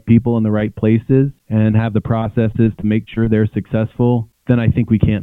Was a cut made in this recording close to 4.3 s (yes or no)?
yes